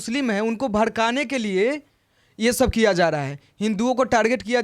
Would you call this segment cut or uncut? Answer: uncut